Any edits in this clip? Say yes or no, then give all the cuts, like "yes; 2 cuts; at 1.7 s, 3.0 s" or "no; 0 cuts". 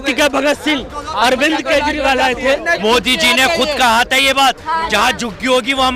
yes; 1 cut; at 2.8 s